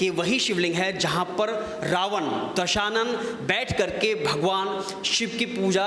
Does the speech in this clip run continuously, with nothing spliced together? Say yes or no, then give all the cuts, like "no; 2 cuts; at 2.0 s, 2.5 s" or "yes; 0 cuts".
yes; 0 cuts